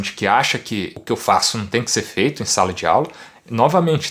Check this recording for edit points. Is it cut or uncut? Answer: cut